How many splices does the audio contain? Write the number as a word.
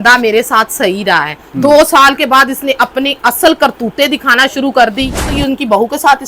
one